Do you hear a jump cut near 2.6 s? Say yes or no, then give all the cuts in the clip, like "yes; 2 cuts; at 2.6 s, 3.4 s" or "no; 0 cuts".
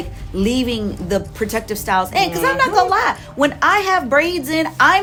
no; 0 cuts